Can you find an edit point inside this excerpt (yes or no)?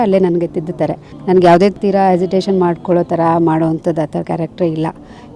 no